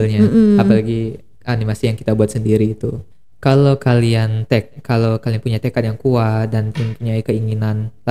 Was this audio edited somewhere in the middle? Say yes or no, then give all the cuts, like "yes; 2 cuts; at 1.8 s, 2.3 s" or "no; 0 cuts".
yes; 1 cut; at 3.0 s